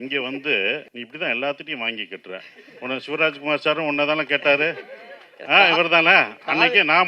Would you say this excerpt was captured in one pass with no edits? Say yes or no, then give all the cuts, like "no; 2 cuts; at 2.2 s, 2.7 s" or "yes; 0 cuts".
no; 1 cut; at 0.9 s